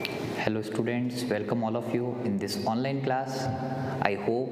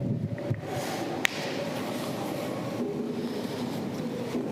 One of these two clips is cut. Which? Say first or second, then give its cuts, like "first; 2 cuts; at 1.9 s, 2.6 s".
first; 1 cut; at 1.6 s